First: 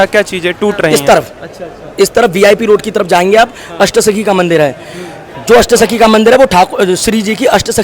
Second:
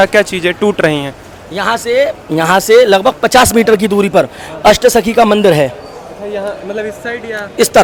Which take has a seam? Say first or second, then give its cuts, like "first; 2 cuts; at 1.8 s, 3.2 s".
first; 1 cut; at 0.9 s